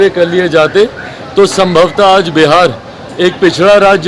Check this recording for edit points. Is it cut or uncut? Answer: uncut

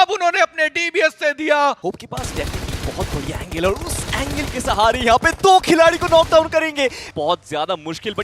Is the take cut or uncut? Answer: cut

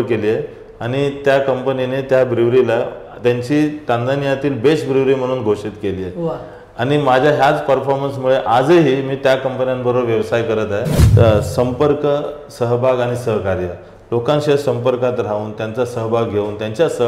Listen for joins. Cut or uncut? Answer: cut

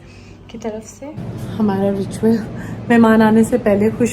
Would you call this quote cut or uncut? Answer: cut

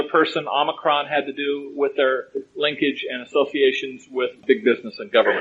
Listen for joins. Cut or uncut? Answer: cut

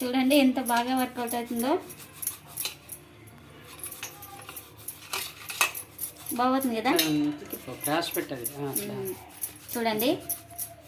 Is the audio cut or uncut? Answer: uncut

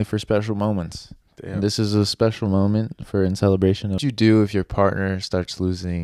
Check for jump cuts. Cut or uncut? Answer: cut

